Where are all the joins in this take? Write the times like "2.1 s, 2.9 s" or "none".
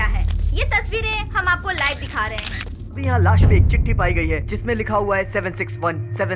3.0 s